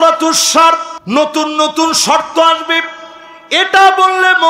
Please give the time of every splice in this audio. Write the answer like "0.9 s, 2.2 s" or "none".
0.9 s